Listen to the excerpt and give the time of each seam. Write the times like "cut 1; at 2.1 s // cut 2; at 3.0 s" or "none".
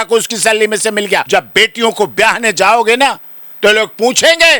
cut 1; at 1.2 s